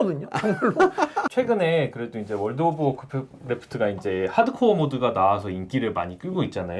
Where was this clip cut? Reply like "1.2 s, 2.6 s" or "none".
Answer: 1.3 s